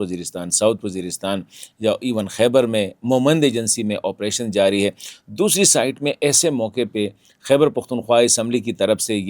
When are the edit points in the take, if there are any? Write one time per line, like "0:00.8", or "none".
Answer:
none